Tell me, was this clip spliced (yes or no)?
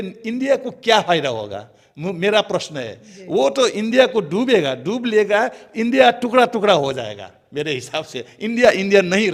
no